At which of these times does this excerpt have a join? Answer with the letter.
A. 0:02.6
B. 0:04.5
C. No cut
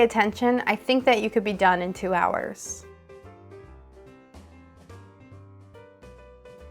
A